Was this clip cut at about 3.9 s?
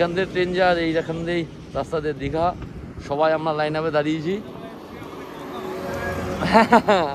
no; 0 cuts

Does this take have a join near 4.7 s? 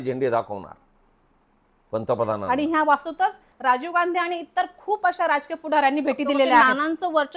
no; 2 cuts; at 2.4 s, 6.6 s

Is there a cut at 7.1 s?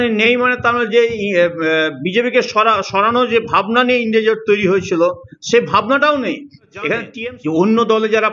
yes; 1 cut; at 7.1 s

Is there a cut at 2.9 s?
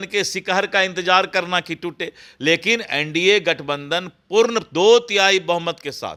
no; 0 cuts

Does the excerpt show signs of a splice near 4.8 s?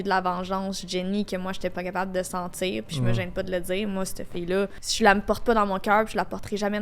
yes; 1 cut; at 4.8 s

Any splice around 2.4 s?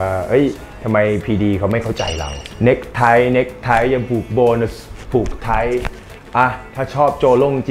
yes; 1 cut; at 2.4 s

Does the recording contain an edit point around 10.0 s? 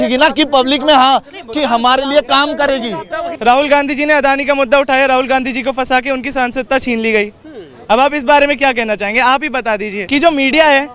yes; 2 cuts; at 3.3 s, 10.0 s

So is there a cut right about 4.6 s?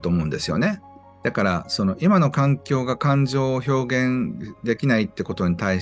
no; 1 cut; at 1.1 s

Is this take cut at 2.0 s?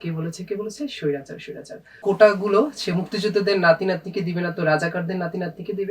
yes; 1 cut; at 2.0 s

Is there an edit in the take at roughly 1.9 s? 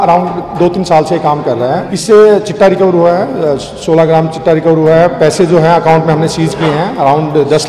yes; 1 cut; at 1.9 s

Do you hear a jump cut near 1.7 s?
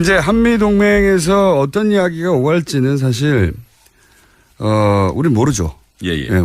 yes; 1 cut; at 1.7 s

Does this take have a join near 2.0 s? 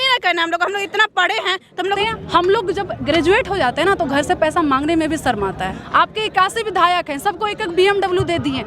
yes; 2 cuts; at 2.0 s, 5.8 s

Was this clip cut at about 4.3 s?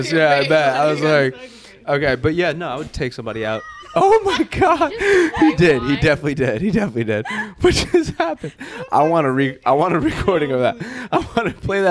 no; 0 cuts

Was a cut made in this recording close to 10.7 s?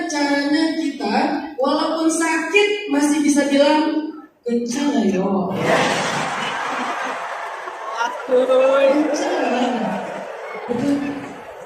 yes; 1 cut; at 10.7 s

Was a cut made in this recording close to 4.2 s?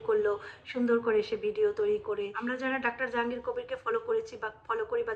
no; 1 cut; at 2.3 s

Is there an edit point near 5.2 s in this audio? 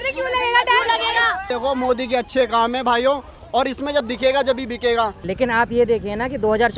yes; 2 cuts; at 1.5 s, 5.2 s

